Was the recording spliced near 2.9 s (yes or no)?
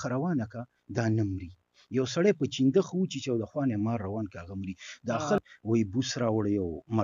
no